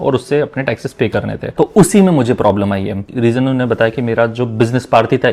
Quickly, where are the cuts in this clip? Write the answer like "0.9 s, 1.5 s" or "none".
1.4 s, 3.1 s

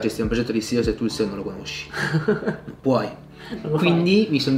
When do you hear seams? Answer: none

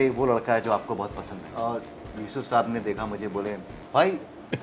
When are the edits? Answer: 1.5 s, 3.7 s

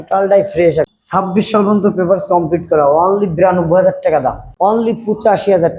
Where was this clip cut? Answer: 1.0 s, 4.4 s

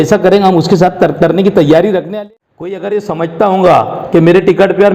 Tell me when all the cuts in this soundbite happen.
2.0 s

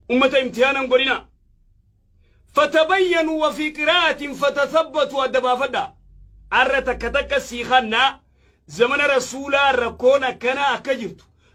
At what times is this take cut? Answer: none

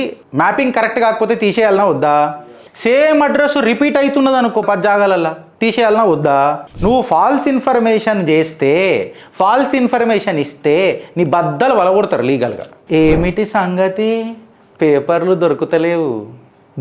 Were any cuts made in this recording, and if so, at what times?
6.7 s, 12.7 s

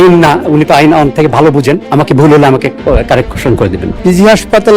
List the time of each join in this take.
1.8 s, 3.8 s

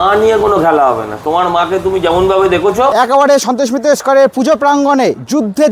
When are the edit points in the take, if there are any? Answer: 2.9 s

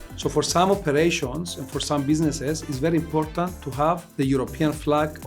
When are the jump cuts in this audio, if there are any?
4.1 s

